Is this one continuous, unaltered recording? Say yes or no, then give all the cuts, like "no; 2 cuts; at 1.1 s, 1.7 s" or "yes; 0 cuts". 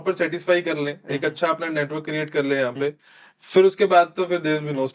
yes; 0 cuts